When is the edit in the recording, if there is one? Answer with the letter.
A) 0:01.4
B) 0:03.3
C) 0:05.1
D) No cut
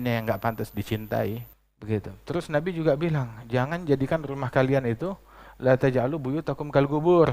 A